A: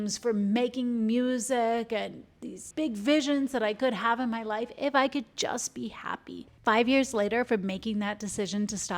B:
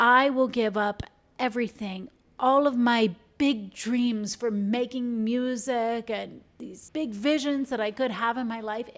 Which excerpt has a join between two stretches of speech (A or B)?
A